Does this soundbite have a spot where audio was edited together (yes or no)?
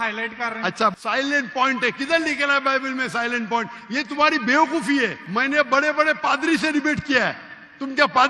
yes